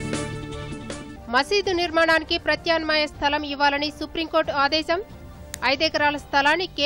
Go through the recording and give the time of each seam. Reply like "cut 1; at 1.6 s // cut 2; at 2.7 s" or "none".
cut 1; at 1.1 s